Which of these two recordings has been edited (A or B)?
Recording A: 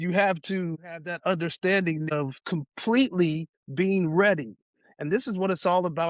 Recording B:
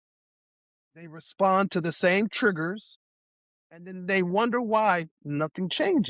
A